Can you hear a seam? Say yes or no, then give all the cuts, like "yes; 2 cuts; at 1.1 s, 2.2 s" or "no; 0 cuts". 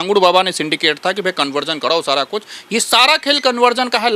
no; 0 cuts